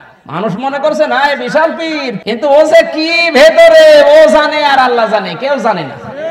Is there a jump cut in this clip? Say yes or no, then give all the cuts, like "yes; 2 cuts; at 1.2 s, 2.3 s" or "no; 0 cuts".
yes; 1 cut; at 2.2 s